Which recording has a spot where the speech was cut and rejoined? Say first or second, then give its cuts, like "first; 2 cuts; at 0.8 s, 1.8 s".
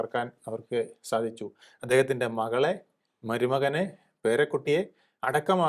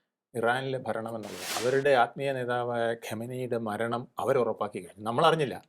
second; 1 cut; at 1.5 s